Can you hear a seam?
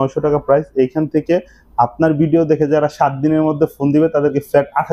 no; 0 cuts

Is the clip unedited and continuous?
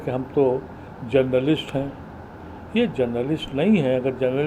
yes; 0 cuts

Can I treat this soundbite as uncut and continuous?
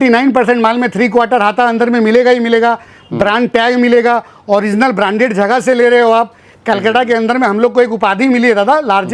yes; 0 cuts

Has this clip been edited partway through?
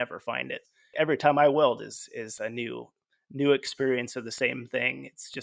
yes; 1 cut; at 0.9 s

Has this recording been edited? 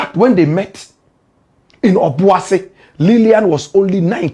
no; 0 cuts

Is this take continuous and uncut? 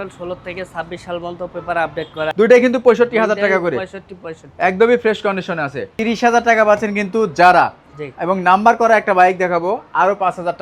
no; 2 cuts; at 2.3 s, 5.9 s

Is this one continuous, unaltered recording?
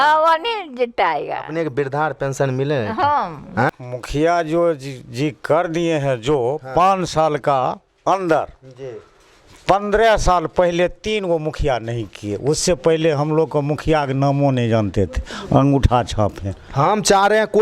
no; 1 cut; at 3.8 s

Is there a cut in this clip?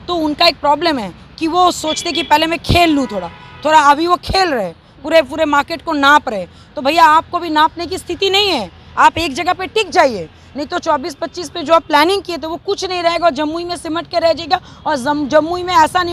no; 0 cuts

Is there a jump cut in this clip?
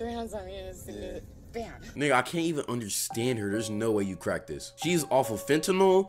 no; 0 cuts

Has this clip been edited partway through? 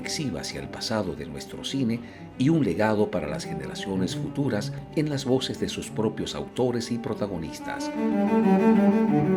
no; 0 cuts

